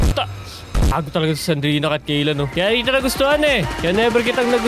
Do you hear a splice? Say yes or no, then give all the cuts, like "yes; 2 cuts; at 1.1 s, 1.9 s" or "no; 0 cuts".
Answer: yes; 2 cuts; at 2.5 s, 3.7 s